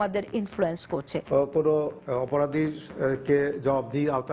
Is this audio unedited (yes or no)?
no